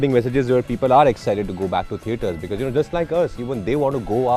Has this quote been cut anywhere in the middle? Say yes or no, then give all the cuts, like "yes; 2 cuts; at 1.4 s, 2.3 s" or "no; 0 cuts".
no; 0 cuts